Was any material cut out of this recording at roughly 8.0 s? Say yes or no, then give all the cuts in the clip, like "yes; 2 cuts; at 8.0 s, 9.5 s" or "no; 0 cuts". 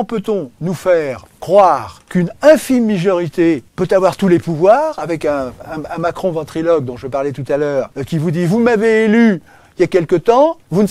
yes; 3 cuts; at 2.0 s, 3.7 s, 8.0 s